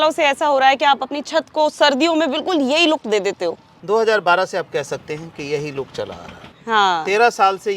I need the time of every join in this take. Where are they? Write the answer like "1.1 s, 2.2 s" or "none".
6.4 s